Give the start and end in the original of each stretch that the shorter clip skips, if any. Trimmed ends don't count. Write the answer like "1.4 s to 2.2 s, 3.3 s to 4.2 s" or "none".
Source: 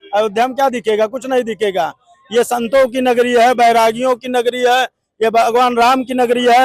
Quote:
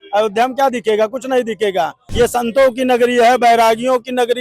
2.0 s to 2.2 s